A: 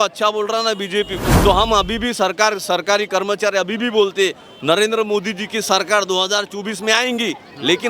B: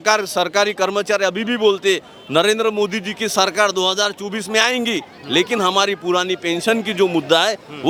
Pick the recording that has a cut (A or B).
A